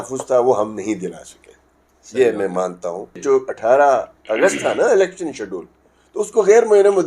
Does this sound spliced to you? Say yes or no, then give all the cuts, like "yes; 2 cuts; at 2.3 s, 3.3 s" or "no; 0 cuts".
yes; 1 cut; at 3.1 s